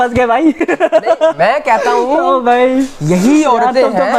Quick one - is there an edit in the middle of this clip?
no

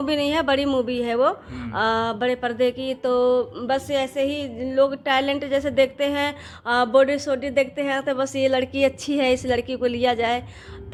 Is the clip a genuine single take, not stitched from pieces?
yes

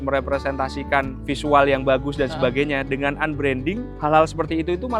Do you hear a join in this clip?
yes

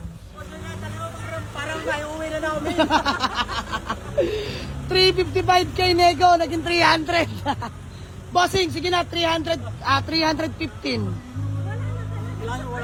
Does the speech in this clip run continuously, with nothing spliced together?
yes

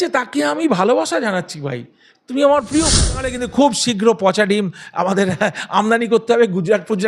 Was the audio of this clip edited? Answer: yes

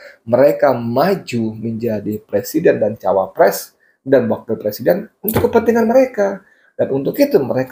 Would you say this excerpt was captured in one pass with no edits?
yes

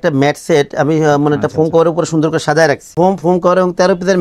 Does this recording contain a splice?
yes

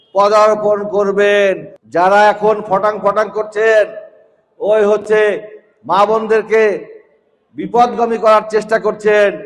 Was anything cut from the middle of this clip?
yes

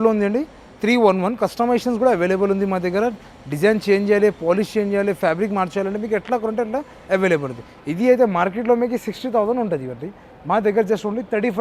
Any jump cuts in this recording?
no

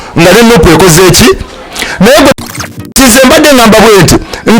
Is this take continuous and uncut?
no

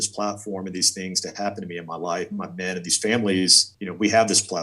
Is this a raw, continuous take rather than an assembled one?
no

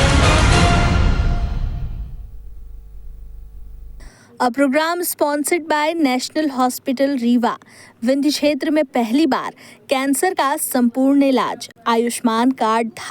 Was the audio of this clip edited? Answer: yes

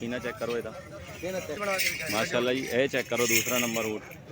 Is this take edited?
yes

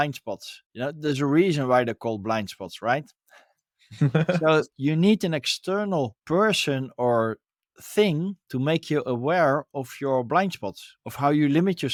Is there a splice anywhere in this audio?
no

